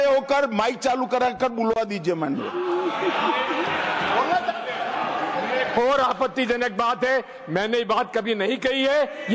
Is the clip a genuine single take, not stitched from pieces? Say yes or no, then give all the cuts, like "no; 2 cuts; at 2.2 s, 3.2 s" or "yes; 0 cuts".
yes; 0 cuts